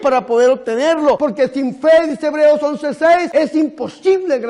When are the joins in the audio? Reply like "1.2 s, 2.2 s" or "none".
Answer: 1.2 s, 3.3 s